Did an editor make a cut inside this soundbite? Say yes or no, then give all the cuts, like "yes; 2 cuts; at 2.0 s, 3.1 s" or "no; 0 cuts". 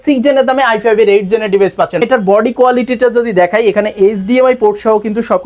yes; 1 cut; at 2.0 s